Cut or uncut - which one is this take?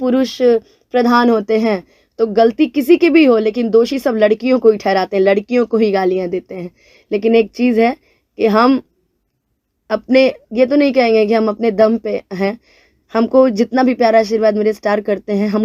uncut